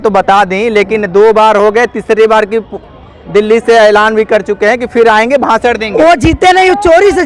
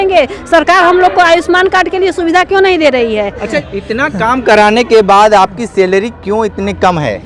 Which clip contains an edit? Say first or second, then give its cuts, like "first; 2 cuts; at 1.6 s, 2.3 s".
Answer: second; 1 cut; at 3.7 s